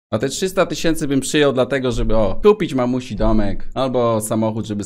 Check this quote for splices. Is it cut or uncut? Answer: uncut